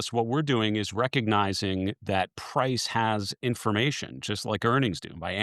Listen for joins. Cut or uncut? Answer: uncut